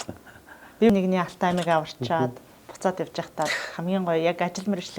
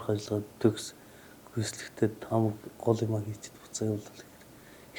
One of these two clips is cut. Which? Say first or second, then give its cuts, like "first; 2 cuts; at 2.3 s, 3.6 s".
first; 1 cut; at 0.9 s